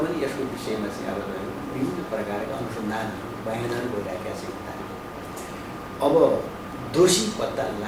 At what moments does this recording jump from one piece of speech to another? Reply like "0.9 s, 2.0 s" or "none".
none